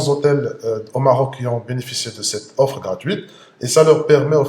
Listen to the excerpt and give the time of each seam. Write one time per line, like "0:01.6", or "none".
none